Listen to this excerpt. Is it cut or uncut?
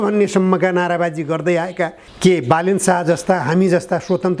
cut